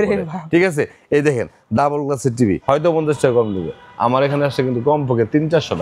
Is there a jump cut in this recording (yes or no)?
yes